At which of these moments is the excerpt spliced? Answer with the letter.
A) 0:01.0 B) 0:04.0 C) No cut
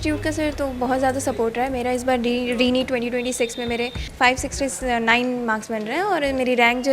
B